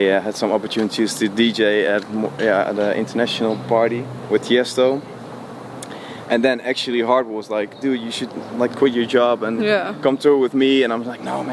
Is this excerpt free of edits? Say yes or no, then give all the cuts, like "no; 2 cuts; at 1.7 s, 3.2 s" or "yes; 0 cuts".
yes; 0 cuts